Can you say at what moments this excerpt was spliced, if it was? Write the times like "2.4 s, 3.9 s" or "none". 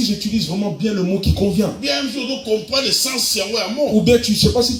none